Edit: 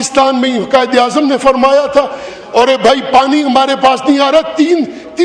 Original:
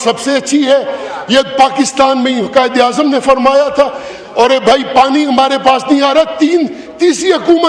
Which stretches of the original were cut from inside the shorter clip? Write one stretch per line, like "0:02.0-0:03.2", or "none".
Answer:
none